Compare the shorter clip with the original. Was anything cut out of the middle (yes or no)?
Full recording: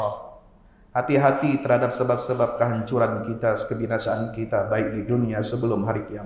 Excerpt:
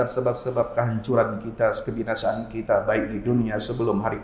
no